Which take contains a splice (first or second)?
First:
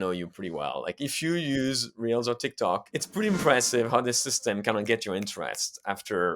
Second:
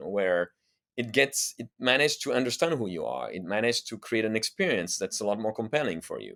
first